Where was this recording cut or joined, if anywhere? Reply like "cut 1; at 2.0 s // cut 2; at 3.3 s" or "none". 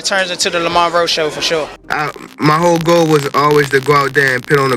cut 1; at 1.8 s

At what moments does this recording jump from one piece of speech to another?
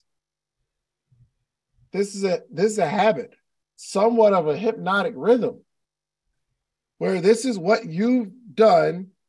none

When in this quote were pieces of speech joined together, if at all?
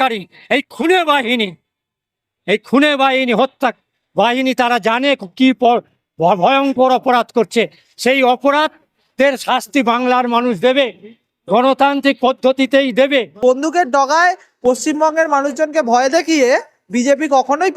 cut 1; at 13.4 s

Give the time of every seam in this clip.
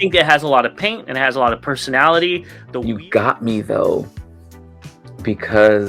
cut 1; at 2.6 s

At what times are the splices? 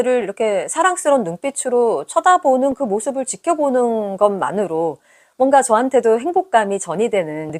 none

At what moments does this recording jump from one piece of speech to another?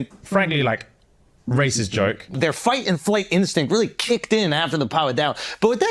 cut 1; at 2.4 s

